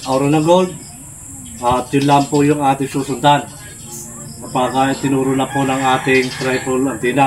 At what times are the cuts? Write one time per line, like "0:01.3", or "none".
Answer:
none

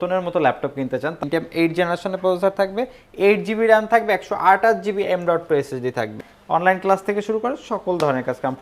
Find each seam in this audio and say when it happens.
0:01.2
0:06.3

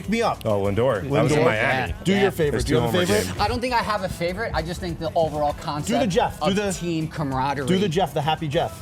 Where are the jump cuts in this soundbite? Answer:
none

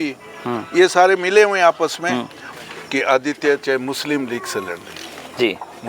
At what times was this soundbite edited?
0:02.4

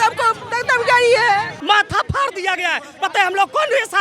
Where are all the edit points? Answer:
0:01.5

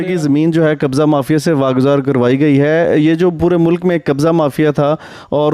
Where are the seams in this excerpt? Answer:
none

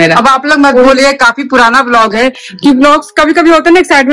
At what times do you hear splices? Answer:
none

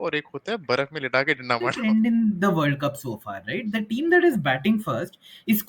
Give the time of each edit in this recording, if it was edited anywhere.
0:01.8

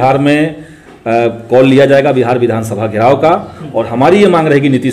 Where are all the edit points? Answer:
none

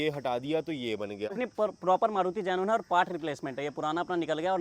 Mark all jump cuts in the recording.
0:01.4

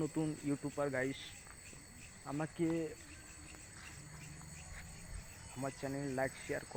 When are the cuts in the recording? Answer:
none

